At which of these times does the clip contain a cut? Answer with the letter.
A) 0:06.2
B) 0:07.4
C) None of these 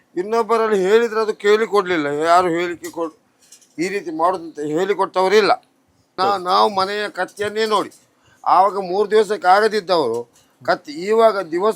A